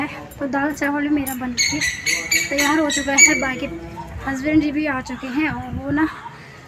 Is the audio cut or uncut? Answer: uncut